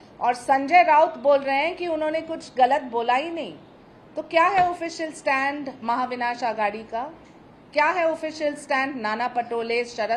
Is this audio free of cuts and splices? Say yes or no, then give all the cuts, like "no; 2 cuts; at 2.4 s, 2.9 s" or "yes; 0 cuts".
yes; 0 cuts